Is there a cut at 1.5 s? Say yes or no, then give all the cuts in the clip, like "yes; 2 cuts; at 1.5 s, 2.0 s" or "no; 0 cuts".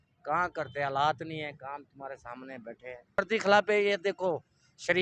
no; 1 cut; at 3.2 s